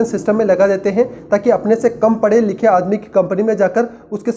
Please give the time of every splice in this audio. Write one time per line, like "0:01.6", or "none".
none